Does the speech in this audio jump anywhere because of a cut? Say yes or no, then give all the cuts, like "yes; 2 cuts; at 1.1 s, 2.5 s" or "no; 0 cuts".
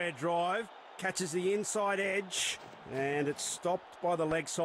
no; 0 cuts